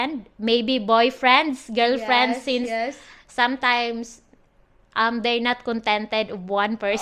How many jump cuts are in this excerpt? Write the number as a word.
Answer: zero